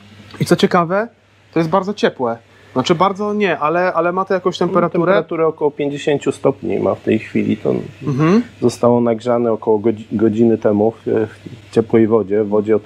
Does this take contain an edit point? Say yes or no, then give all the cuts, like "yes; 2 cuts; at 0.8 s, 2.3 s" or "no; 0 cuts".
no; 0 cuts